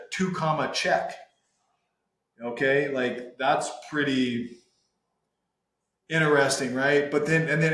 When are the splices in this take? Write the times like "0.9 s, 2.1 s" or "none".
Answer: none